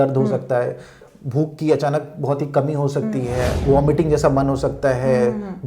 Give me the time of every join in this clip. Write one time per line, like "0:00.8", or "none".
0:03.6